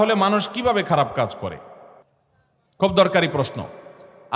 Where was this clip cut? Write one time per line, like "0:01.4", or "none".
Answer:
none